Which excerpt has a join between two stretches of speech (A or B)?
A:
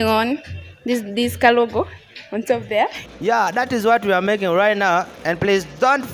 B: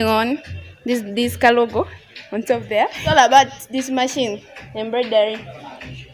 A